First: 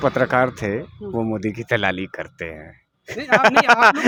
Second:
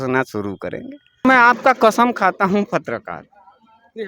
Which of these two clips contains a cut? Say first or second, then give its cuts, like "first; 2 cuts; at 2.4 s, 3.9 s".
second; 1 cut; at 1.2 s